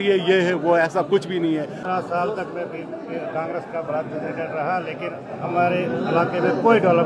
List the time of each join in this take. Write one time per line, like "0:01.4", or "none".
0:01.4